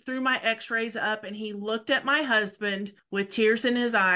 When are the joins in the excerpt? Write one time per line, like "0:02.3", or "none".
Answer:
0:03.0

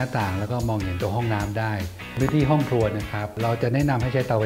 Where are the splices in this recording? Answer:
0:02.2
0:03.3

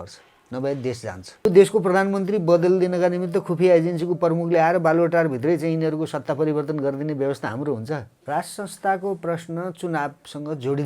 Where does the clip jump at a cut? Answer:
0:01.5
0:08.1

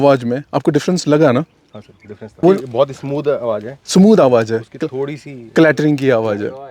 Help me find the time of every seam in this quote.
0:02.4

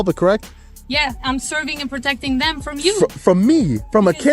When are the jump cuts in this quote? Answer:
none

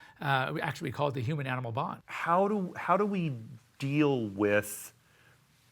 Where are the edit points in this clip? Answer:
0:02.1

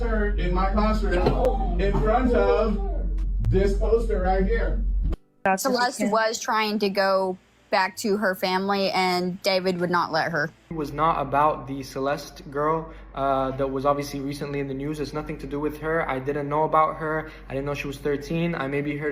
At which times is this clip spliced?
0:05.3
0:10.7

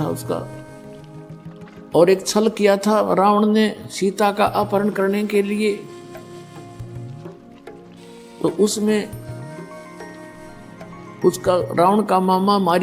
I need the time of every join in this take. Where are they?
none

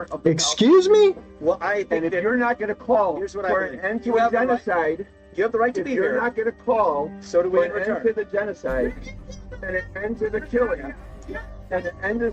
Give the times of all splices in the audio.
none

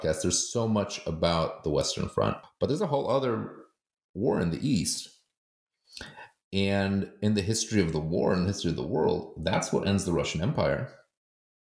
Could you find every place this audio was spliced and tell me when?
0:02.5

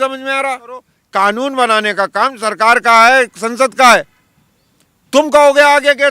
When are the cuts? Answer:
0:01.0

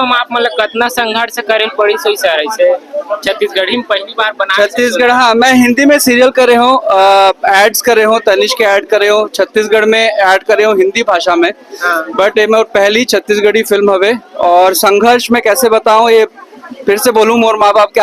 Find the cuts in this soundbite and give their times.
none

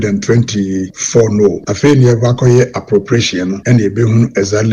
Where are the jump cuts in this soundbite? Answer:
0:00.9
0:01.7
0:03.6

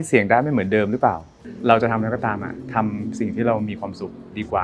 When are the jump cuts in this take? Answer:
0:01.4

